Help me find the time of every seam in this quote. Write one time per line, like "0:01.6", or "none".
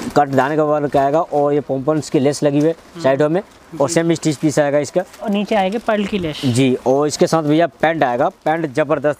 none